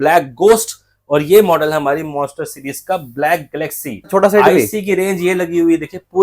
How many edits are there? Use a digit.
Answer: 1